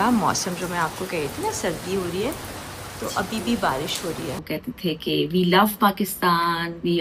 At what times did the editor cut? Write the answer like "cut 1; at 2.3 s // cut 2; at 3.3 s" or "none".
cut 1; at 4.4 s

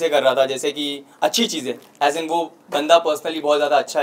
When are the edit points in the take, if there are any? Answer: none

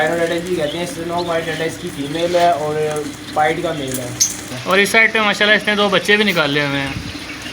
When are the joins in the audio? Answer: cut 1; at 4.5 s

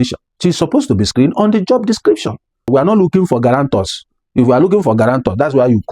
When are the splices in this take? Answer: cut 1; at 2.7 s

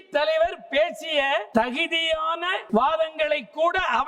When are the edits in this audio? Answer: cut 1; at 1.5 s // cut 2; at 2.6 s

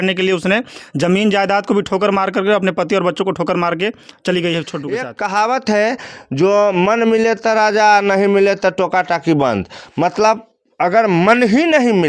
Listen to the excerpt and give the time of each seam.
cut 1; at 5.1 s

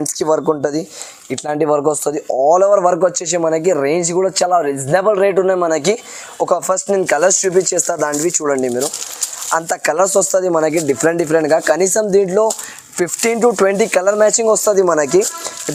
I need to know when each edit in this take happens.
none

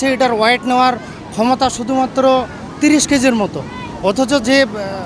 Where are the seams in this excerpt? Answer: none

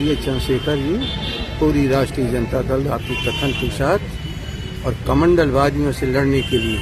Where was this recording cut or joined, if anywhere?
none

